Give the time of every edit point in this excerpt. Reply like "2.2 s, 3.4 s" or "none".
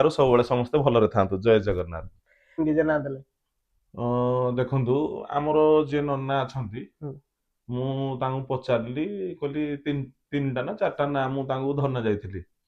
2.6 s